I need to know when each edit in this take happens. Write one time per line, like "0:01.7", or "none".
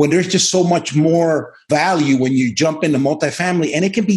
0:01.6